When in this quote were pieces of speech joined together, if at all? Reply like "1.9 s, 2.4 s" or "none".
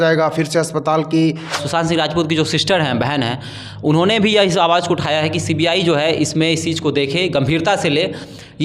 1.6 s